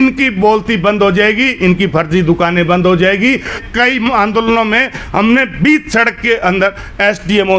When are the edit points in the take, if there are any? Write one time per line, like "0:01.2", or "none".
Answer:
0:03.6